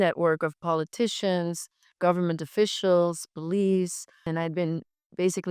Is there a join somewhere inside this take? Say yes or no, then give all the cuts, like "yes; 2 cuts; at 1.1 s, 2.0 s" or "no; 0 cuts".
yes; 1 cut; at 4.3 s